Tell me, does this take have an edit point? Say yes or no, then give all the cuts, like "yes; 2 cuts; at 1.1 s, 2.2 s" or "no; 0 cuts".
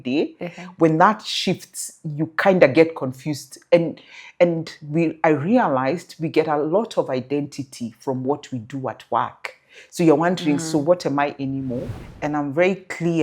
yes; 1 cut; at 11.9 s